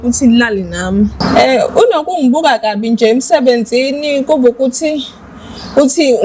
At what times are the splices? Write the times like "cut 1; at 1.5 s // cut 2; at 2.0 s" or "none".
cut 1; at 1.1 s